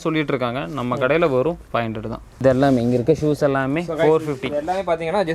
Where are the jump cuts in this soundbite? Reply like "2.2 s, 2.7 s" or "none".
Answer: 2.2 s